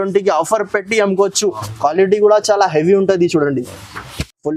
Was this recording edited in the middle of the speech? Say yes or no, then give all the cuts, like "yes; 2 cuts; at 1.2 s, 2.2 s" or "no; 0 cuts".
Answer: no; 0 cuts